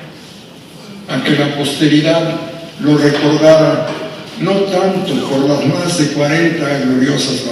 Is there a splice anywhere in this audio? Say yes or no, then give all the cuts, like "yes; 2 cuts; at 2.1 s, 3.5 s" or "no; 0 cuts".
yes; 1 cut; at 5.1 s